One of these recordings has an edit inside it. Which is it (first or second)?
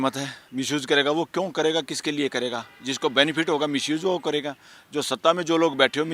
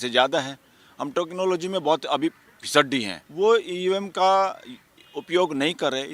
second